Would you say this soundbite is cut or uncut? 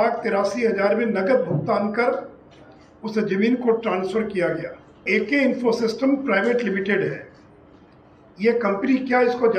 cut